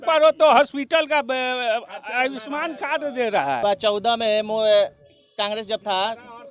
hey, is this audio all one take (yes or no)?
no